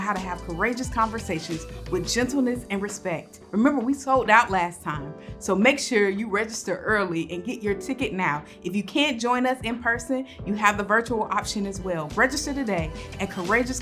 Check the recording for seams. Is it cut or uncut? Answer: cut